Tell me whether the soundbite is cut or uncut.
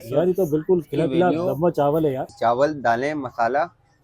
cut